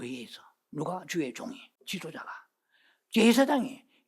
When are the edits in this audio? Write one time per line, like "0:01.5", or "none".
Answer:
0:01.7